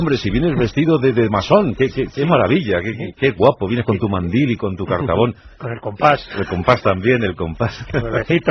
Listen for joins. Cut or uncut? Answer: uncut